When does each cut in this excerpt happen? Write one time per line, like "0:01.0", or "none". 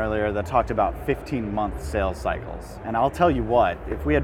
none